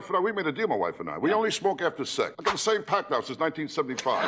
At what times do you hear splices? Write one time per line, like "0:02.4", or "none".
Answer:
none